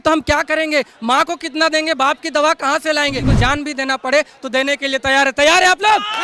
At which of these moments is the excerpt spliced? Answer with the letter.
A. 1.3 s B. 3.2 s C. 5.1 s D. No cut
B